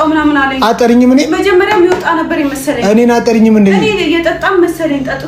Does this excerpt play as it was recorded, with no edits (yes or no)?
yes